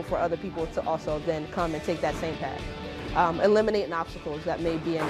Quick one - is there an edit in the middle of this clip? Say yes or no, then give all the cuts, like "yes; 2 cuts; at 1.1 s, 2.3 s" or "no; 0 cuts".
no; 0 cuts